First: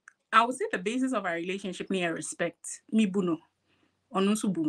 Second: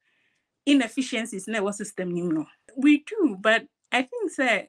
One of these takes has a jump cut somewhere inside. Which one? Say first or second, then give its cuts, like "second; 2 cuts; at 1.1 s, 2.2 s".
second; 1 cut; at 2.6 s